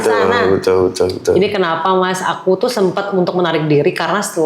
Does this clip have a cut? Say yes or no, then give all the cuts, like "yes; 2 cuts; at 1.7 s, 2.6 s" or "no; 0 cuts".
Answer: no; 0 cuts